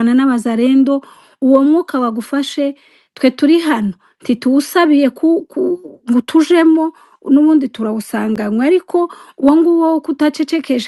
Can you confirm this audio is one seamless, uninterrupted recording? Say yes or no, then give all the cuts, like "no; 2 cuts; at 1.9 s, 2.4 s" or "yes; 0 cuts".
yes; 0 cuts